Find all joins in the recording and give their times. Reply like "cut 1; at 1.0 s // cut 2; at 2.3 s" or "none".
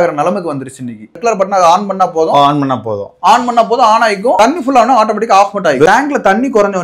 cut 1; at 1.2 s // cut 2; at 5.9 s